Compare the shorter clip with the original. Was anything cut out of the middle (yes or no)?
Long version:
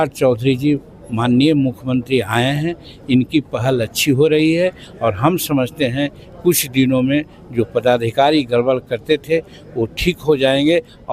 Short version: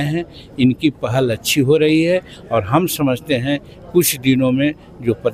no